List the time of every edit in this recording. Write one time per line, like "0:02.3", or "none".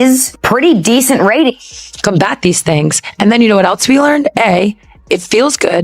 0:01.4